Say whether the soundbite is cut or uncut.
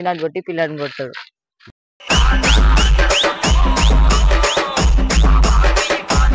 cut